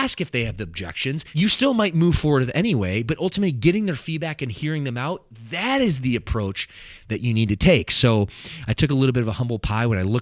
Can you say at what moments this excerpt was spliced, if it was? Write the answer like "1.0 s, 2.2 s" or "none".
1.2 s